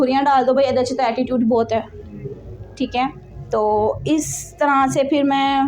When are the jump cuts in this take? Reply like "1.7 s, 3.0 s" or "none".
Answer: none

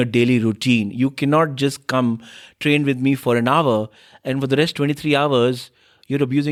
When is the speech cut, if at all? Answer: none

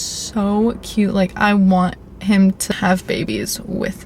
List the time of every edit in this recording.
2.7 s

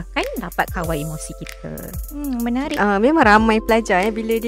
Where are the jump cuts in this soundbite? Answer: 2.8 s

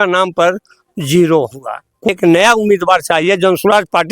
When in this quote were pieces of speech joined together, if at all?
2.1 s

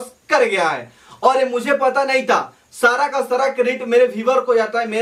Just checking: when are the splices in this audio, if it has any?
none

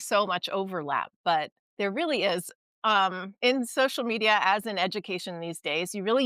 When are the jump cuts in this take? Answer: 1.6 s, 3.3 s

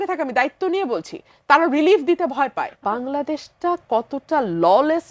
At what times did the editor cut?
2.8 s

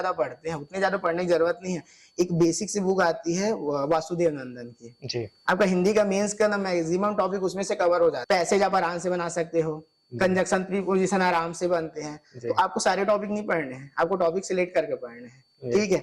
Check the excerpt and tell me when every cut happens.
8.2 s

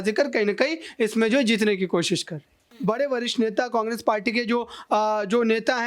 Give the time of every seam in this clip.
2.7 s

